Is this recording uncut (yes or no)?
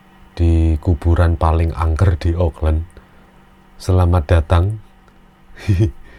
yes